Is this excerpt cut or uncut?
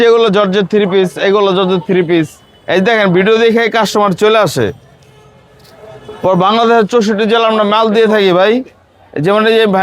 uncut